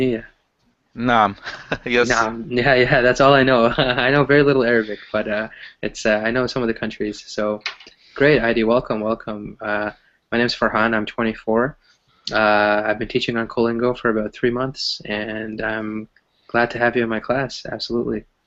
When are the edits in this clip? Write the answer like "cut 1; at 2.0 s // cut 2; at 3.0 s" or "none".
none

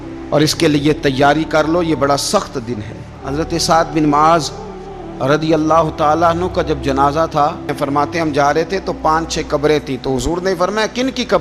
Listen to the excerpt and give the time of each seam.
cut 1; at 3.2 s // cut 2; at 7.7 s

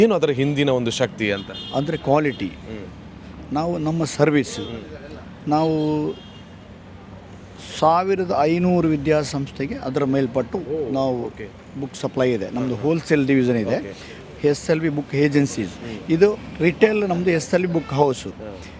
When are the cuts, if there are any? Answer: none

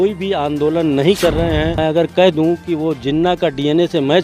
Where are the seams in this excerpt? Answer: cut 1; at 1.8 s

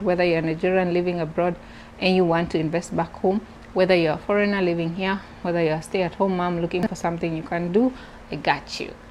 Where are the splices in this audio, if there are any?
none

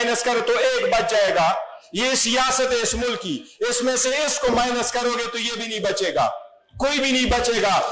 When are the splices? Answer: none

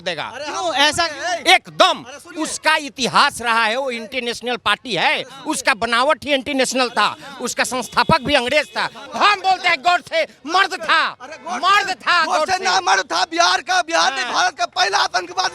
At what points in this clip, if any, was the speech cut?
cut 1; at 9.0 s

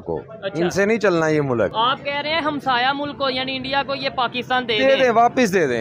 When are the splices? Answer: cut 1; at 1.7 s

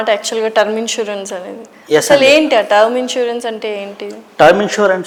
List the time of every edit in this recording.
none

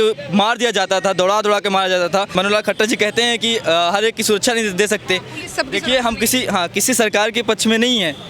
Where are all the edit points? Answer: cut 1; at 2.3 s

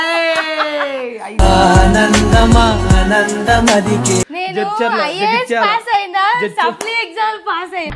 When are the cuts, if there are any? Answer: cut 1; at 4.3 s

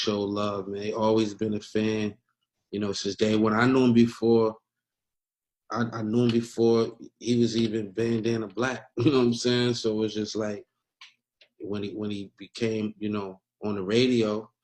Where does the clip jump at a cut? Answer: none

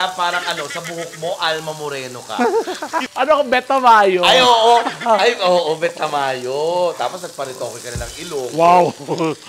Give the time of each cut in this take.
none

